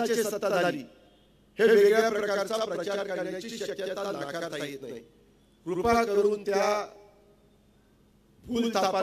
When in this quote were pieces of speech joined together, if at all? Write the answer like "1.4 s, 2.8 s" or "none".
none